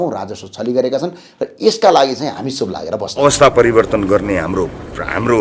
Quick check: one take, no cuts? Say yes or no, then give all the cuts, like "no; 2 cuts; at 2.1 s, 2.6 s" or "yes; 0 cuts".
no; 1 cut; at 3.1 s